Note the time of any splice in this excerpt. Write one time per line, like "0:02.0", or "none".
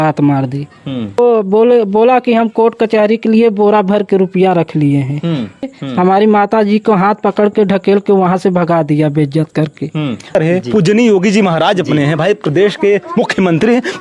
0:01.2
0:05.8
0:10.4